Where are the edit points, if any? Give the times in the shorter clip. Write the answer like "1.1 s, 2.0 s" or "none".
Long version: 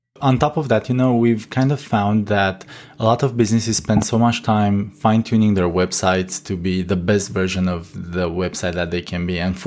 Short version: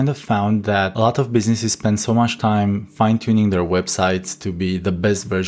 0.9 s